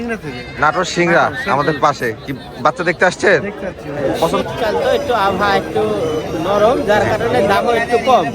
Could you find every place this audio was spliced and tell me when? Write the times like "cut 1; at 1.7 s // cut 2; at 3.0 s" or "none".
cut 1; at 4.2 s